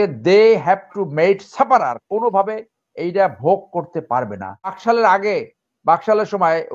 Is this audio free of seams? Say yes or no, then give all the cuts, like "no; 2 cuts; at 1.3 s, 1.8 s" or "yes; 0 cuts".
no; 1 cut; at 4.8 s